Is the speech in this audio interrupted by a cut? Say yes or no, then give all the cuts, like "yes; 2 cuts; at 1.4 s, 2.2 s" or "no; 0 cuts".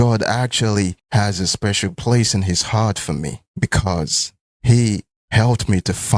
no; 0 cuts